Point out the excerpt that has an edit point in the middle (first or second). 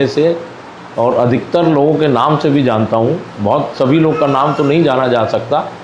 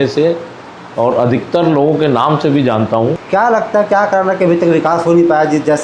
second